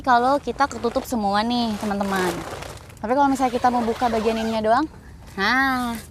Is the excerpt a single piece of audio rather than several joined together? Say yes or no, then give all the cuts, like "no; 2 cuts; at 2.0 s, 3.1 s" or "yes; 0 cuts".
yes; 0 cuts